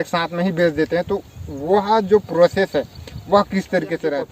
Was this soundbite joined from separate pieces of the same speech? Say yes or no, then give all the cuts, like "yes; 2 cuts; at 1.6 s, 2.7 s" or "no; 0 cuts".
no; 0 cuts